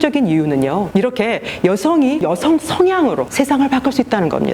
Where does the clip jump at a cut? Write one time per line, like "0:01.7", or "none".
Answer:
0:00.9
0:02.2
0:03.3